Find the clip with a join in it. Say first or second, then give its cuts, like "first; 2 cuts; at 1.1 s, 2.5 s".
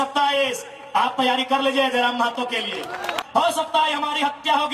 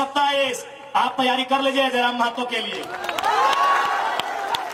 first; 1 cut; at 3.1 s